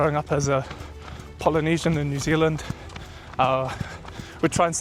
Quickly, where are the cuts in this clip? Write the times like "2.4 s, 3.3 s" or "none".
none